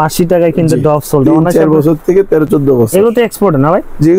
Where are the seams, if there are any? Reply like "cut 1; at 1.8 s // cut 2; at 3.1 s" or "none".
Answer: none

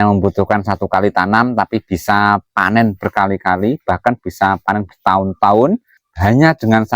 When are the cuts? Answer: cut 1; at 6.1 s

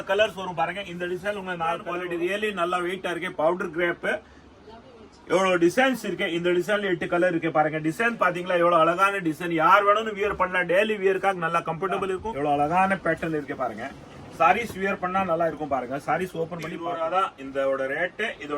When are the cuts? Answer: cut 1; at 1.9 s // cut 2; at 12.2 s // cut 3; at 16.7 s

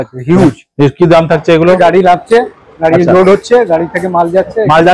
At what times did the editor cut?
cut 1; at 1.8 s

